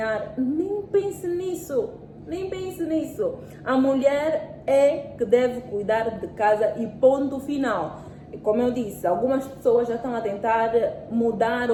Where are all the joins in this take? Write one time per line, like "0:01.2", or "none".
none